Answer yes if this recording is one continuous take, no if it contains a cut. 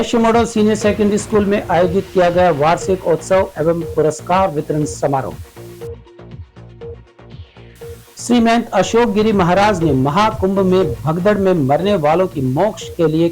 yes